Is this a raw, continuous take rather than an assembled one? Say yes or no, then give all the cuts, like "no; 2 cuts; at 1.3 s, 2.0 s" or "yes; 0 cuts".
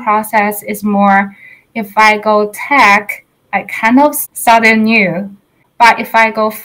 no; 2 cuts; at 4.2 s, 5.6 s